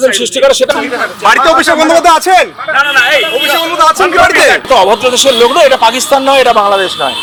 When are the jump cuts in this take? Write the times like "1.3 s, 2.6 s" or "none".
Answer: none